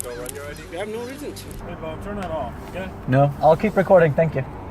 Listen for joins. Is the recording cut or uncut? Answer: cut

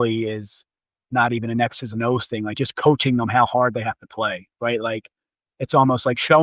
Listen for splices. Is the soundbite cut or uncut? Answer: uncut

